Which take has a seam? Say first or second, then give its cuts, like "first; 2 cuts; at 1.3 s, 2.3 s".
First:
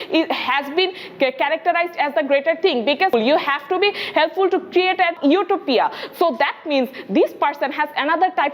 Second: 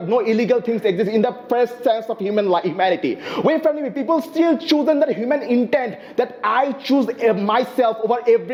first; 2 cuts; at 3.1 s, 5.1 s